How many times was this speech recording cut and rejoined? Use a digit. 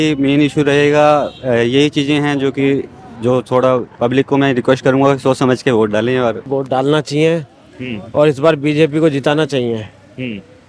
1